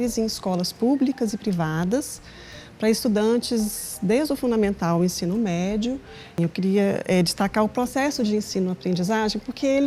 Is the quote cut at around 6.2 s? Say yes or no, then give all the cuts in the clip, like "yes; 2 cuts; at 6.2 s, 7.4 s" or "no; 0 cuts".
yes; 1 cut; at 6.2 s